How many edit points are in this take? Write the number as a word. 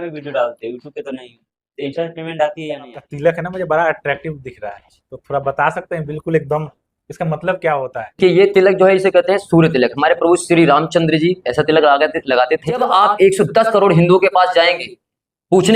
two